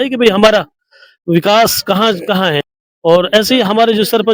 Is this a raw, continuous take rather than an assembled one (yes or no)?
no